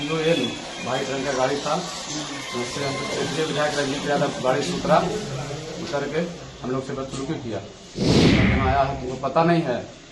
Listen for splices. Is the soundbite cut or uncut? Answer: uncut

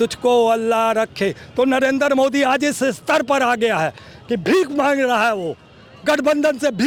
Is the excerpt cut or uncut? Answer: uncut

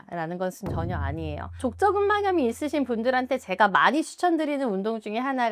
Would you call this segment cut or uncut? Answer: cut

